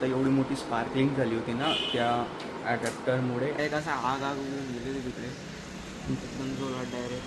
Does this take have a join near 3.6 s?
yes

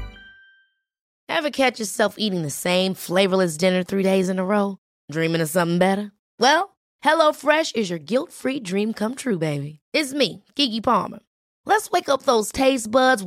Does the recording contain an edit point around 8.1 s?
no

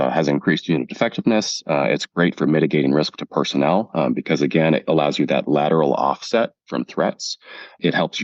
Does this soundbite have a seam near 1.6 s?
no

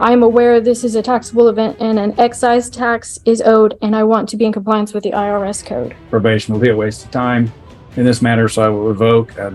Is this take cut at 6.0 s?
yes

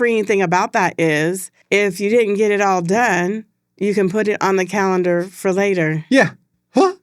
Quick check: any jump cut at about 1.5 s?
yes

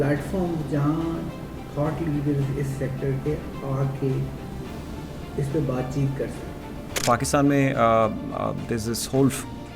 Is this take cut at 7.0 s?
yes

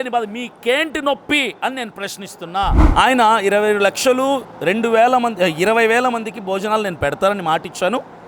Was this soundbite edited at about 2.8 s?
yes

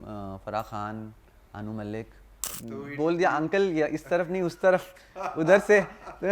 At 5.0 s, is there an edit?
no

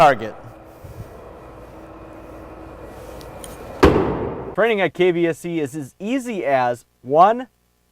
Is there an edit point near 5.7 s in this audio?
no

